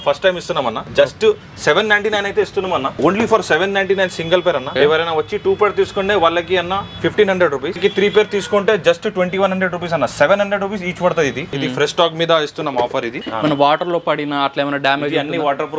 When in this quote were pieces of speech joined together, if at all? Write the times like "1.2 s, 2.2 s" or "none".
0.8 s, 2.9 s, 4.7 s, 7.8 s, 11.4 s, 13.2 s